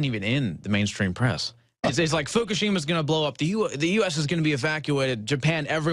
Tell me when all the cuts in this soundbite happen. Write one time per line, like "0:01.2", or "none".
none